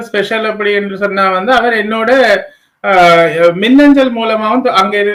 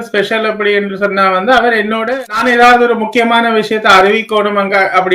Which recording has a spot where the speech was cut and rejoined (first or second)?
second